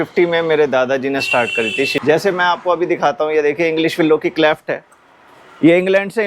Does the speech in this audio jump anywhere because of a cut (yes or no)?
yes